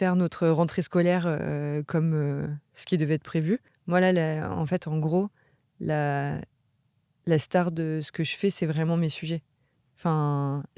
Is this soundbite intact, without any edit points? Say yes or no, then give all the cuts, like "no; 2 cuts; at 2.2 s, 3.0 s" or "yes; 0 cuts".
no; 1 cut; at 3.7 s